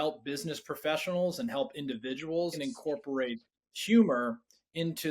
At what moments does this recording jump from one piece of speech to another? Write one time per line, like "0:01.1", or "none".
0:02.5